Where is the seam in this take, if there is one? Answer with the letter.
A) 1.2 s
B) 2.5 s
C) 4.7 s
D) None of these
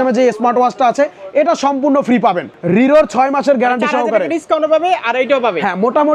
B